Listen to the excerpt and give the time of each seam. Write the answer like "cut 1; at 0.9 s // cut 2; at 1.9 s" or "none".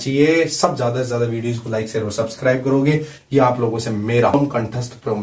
cut 1; at 4.3 s